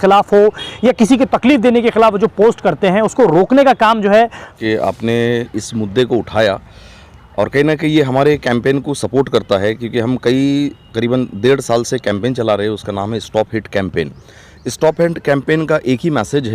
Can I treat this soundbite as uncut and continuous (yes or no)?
no